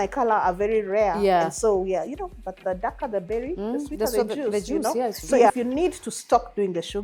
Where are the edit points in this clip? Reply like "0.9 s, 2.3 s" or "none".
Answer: 5.5 s